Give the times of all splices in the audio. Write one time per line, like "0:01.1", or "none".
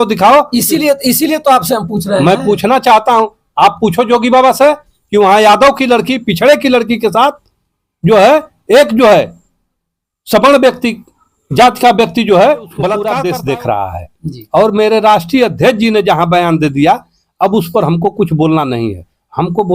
0:13.0